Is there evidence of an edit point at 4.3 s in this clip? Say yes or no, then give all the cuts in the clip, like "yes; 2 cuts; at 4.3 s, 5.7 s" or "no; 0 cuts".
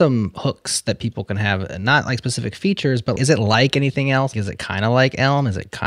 yes; 2 cuts; at 3.2 s, 4.3 s